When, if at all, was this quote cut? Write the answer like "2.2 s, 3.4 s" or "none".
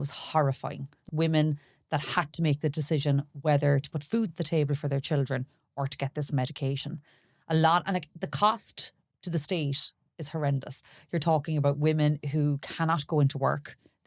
1.1 s